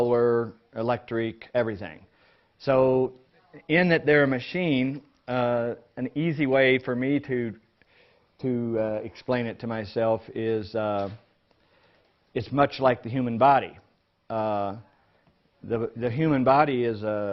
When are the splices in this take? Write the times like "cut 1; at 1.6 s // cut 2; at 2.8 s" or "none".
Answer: cut 1; at 4.2 s